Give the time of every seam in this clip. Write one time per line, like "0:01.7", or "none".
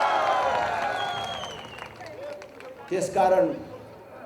none